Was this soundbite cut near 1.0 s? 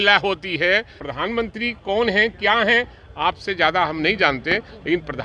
yes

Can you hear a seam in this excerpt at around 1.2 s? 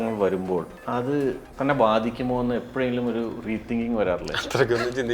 yes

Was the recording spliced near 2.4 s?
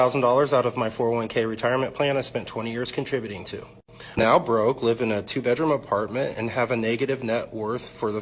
no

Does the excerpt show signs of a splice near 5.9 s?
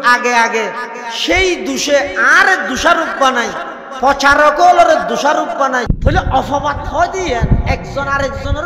yes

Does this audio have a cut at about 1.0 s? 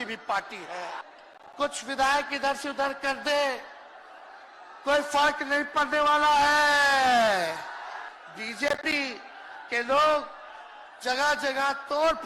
yes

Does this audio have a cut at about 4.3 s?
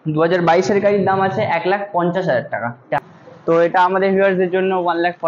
no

